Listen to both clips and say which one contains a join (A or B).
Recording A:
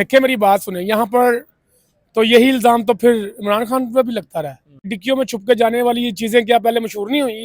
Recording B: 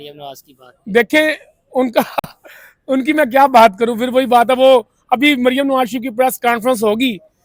A